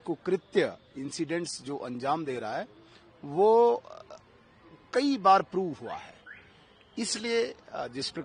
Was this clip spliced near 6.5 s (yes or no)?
no